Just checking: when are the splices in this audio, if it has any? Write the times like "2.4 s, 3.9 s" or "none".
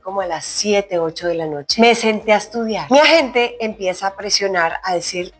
1.6 s, 2.8 s